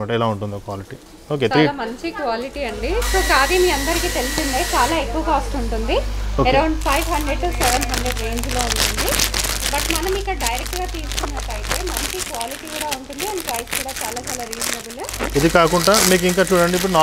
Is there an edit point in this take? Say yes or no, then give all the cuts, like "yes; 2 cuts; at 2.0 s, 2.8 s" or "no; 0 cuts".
no; 0 cuts